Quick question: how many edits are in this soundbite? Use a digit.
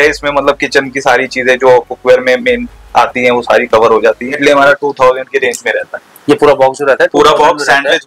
1